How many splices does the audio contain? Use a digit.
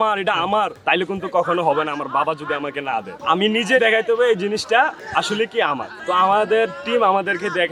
0